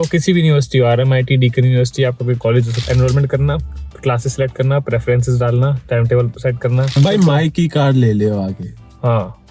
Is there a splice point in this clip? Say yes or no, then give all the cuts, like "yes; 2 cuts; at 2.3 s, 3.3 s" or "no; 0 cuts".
yes; 2 cuts; at 2.8 s, 7.0 s